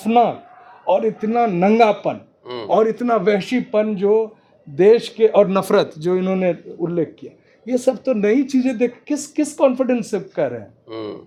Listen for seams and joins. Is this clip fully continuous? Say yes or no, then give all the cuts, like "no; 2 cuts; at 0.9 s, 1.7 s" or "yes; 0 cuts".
yes; 0 cuts